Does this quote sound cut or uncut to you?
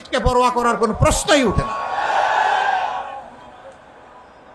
uncut